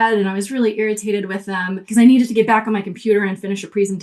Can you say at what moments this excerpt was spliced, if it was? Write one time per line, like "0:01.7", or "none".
0:01.8

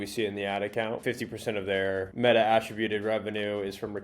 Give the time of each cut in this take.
0:01.0

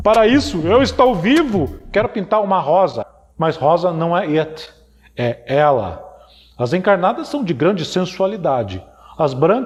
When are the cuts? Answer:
none

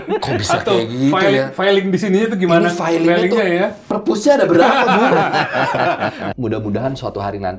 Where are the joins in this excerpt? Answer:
0:06.2

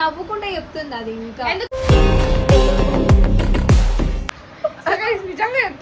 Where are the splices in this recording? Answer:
0:04.2

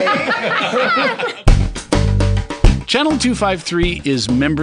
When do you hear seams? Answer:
0:01.4

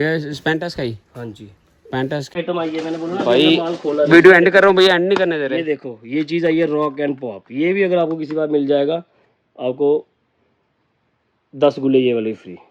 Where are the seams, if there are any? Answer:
0:02.3

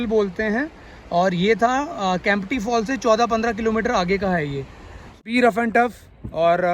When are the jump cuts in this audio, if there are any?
0:05.2

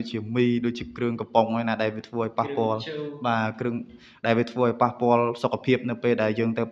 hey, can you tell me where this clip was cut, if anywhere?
none

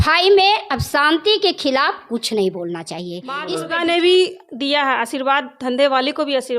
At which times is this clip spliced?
0:03.4

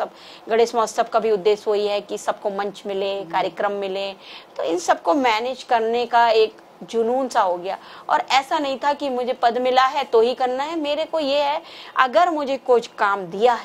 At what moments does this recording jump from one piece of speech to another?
none

